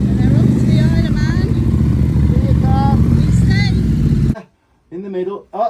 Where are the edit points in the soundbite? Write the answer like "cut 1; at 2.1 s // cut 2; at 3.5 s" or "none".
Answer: cut 1; at 4.3 s